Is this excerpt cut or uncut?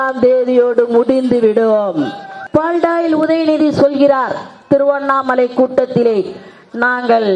cut